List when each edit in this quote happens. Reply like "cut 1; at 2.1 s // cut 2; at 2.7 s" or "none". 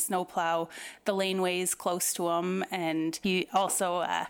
cut 1; at 3.2 s